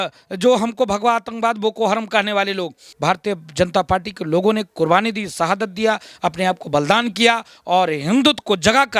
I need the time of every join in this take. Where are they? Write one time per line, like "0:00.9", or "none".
0:02.9